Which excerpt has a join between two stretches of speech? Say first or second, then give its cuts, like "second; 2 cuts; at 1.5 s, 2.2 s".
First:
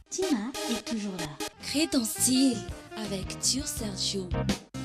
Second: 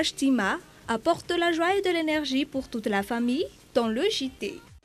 first; 1 cut; at 1.5 s